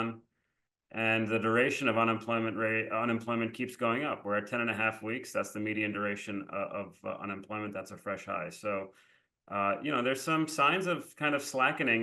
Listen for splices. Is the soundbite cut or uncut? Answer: uncut